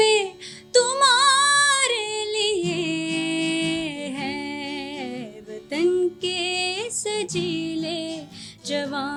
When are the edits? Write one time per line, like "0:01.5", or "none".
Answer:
none